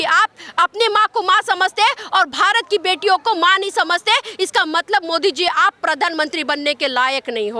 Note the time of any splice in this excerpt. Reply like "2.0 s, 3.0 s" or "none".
none